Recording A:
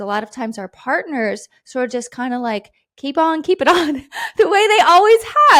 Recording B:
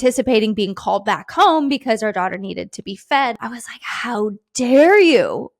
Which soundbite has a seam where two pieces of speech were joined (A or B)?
B